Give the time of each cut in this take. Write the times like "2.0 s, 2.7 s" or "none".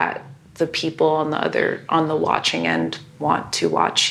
none